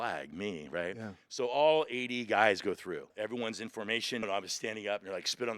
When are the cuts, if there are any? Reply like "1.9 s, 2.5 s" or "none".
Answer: 3.1 s, 4.2 s